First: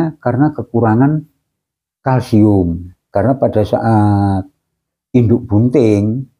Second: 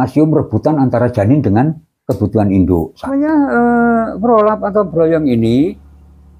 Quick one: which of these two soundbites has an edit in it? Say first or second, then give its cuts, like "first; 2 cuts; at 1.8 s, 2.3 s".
second; 1 cut; at 3.1 s